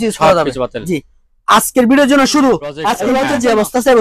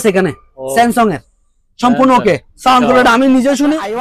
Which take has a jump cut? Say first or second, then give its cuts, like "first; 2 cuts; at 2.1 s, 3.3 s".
first; 1 cut; at 2.9 s